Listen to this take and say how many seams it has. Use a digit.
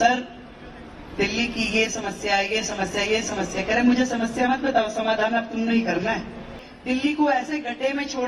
1